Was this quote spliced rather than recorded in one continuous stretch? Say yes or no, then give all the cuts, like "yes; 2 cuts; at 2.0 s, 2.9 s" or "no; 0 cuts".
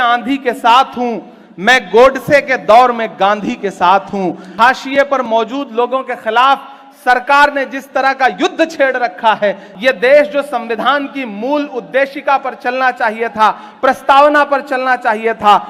yes; 2 cuts; at 4.4 s, 9.7 s